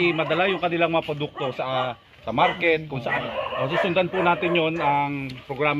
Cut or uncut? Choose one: cut